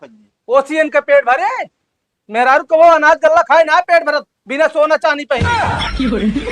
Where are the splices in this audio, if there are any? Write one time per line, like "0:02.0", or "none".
0:05.4